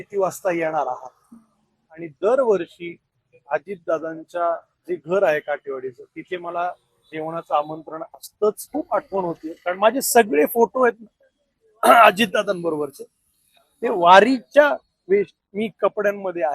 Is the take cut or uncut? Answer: cut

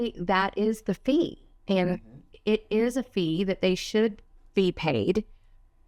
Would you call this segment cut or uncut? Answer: uncut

